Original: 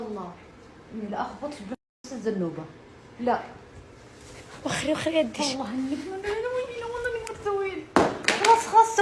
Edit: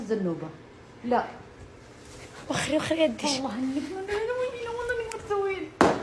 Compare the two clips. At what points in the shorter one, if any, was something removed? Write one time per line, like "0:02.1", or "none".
none